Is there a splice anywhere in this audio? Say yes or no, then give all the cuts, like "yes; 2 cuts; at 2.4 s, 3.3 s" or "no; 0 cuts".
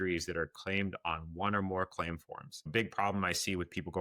yes; 1 cut; at 2.7 s